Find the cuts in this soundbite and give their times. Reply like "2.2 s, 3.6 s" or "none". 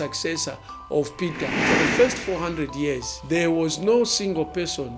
1.6 s